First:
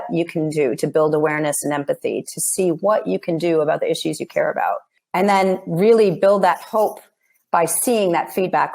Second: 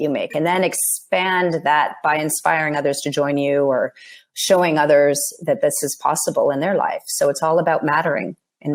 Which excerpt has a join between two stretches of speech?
first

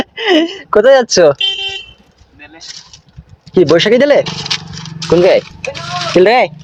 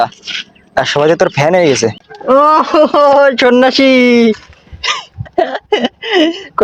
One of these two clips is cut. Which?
second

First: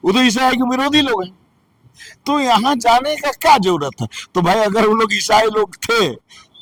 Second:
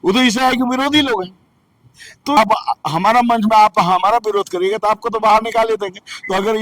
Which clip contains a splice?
second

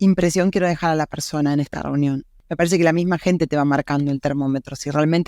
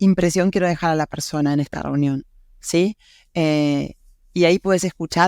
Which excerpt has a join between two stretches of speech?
first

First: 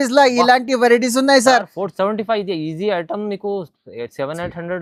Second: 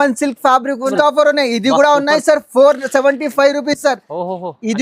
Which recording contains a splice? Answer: second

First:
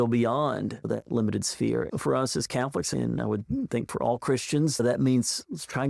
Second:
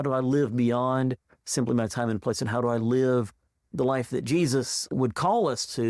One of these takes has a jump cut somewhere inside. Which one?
first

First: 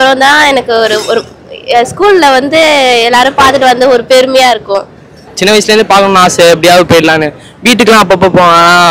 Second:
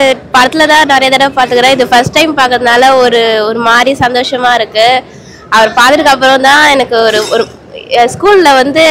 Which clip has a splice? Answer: first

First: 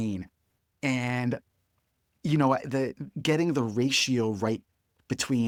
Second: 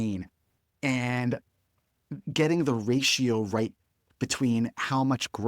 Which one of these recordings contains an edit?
second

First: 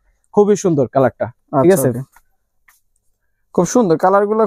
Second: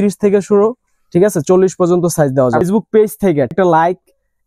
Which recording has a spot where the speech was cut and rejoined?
second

